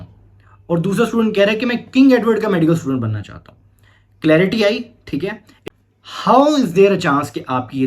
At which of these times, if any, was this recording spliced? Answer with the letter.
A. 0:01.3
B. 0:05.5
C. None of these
B